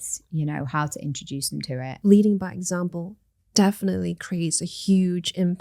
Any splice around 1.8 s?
yes; 1 cut; at 1.8 s

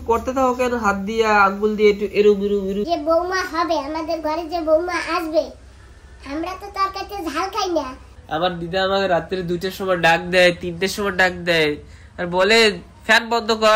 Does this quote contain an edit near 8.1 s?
yes; 2 cuts; at 2.8 s, 8.1 s

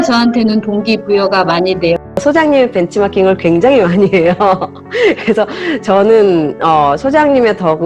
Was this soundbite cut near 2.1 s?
yes; 1 cut; at 2.1 s

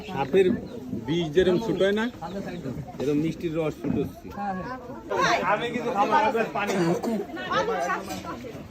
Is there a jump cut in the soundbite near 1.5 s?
no; 1 cut; at 5.1 s

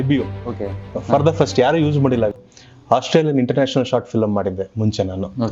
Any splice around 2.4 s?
yes; 1 cut; at 2.4 s

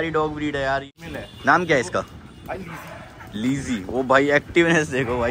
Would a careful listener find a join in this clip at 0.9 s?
yes; 1 cut; at 0.9 s

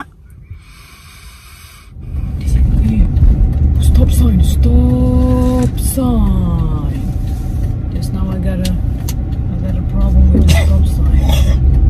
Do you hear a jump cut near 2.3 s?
yes; 1 cut; at 2.3 s

